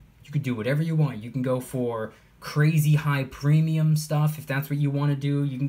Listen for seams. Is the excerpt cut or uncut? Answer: uncut